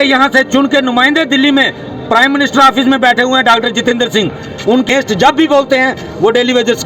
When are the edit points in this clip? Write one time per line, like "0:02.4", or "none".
0:04.9